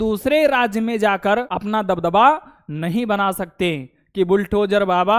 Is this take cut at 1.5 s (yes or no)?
yes